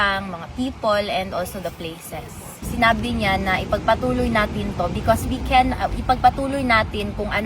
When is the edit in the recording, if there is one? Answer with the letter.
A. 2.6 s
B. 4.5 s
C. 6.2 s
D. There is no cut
A